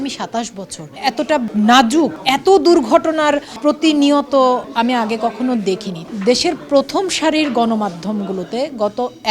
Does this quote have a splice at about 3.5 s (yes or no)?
yes